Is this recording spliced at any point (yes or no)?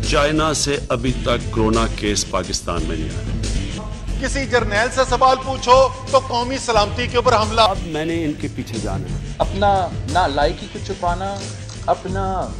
no